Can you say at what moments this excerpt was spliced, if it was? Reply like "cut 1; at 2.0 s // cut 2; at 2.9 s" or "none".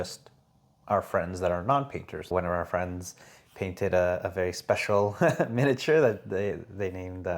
cut 1; at 2.3 s